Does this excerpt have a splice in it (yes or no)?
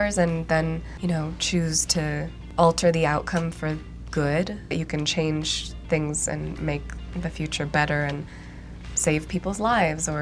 yes